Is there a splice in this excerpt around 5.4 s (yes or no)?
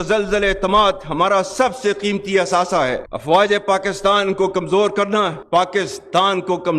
no